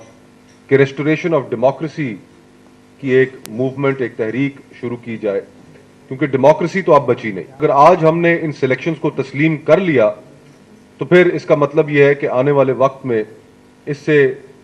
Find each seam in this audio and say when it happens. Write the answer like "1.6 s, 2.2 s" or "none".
7.6 s